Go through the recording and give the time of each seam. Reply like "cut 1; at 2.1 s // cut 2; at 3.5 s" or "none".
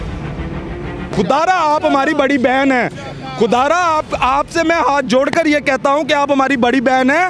cut 1; at 1.1 s